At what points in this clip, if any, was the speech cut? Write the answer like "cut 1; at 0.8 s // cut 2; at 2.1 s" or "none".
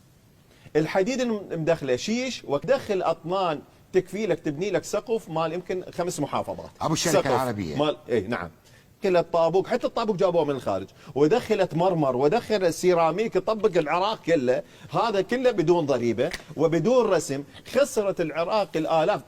cut 1; at 2.6 s // cut 2; at 9.0 s

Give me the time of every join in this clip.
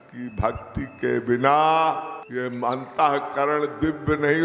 cut 1; at 2.2 s

